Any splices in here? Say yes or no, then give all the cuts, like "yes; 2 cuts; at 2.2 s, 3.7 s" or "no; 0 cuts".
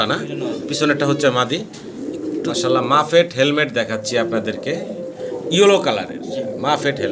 yes; 1 cut; at 2.5 s